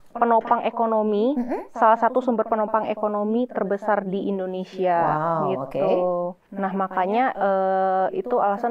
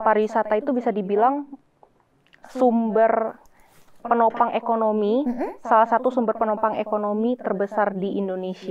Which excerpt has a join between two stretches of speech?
first; 1 cut; at 6.5 s

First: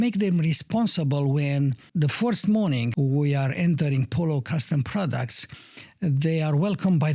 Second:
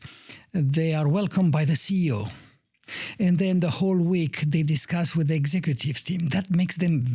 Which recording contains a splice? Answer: first; 1 cut; at 2.9 s

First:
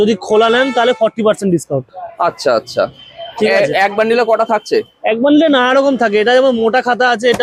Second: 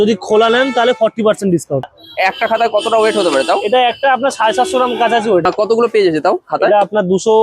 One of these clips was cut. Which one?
second; 2 cuts; at 2.0 s, 5.4 s

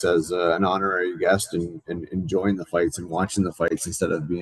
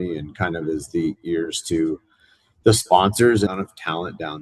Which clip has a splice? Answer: second; 1 cut; at 3.5 s

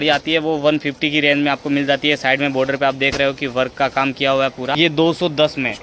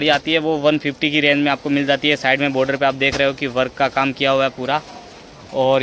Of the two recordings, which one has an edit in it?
first; 1 cut; at 4.8 s

